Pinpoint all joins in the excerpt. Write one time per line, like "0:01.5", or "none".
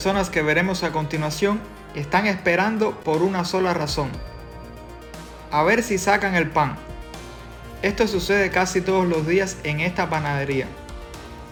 none